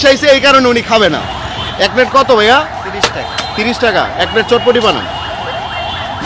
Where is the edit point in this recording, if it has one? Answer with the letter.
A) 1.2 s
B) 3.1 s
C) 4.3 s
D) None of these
A